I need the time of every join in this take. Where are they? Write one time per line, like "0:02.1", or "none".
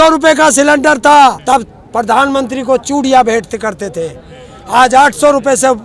0:01.4